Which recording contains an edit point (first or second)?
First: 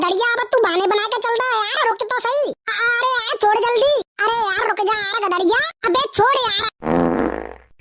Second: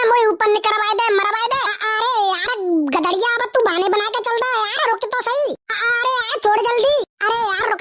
second